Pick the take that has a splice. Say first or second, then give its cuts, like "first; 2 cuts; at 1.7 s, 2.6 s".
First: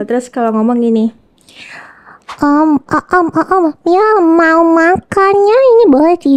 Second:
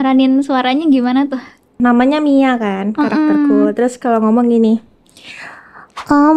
second; 1 cut; at 1.8 s